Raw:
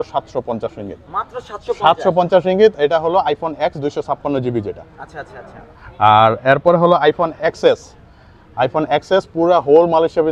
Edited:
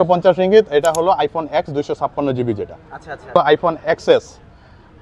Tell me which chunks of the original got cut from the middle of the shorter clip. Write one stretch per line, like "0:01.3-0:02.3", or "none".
0:05.4-0:06.9